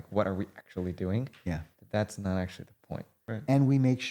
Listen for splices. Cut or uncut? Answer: cut